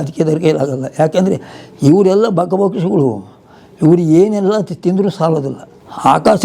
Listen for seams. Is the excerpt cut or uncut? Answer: uncut